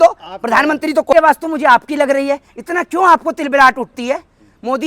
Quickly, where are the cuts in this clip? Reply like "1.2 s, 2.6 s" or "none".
1.1 s